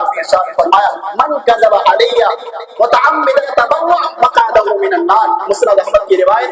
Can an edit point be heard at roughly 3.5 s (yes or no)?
yes